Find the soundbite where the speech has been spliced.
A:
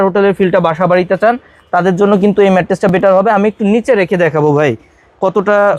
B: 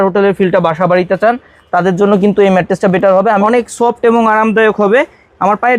B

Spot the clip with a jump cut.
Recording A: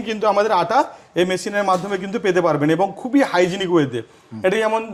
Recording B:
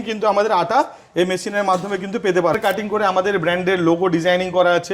B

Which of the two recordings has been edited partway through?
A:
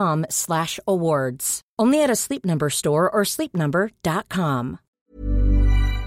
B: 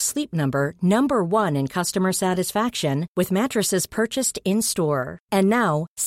A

